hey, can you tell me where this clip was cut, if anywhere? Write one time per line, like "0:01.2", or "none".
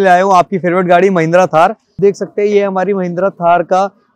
0:02.0